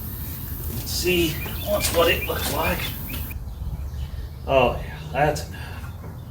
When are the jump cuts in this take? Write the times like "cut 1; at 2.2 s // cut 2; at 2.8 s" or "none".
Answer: cut 1; at 3.3 s